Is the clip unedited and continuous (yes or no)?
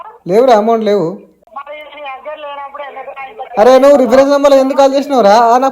no